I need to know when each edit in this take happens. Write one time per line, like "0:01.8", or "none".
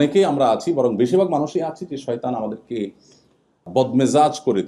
0:03.7

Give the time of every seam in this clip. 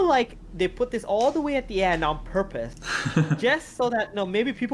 none

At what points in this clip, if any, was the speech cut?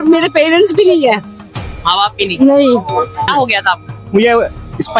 0:03.2

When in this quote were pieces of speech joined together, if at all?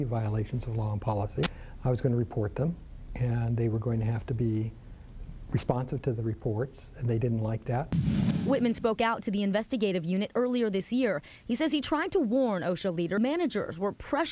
0:01.7
0:13.2

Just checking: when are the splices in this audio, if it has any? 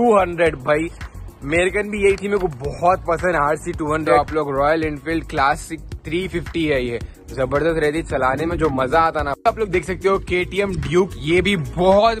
0:04.1
0:09.3

